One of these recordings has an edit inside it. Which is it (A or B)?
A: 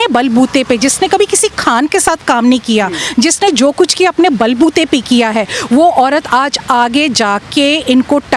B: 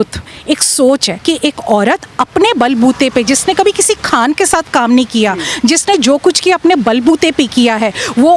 B